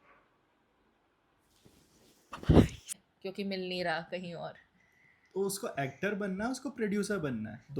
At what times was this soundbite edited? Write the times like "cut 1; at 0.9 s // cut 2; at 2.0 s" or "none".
cut 1; at 2.9 s